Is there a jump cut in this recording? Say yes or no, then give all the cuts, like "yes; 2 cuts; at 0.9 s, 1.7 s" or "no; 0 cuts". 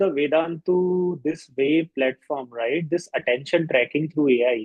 no; 0 cuts